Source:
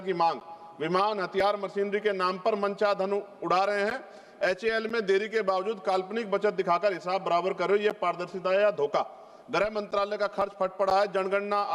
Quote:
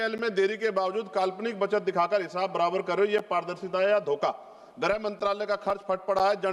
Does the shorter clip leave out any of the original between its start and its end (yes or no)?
no